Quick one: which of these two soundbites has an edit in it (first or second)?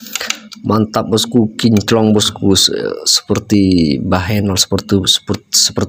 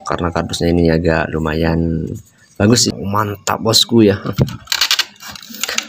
second